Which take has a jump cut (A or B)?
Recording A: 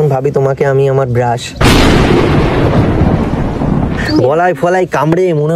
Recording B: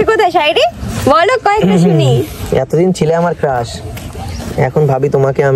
A